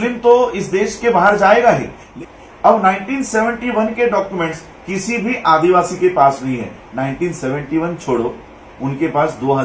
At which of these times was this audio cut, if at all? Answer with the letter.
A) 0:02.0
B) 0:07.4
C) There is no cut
A